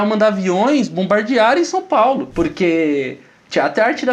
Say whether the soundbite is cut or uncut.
cut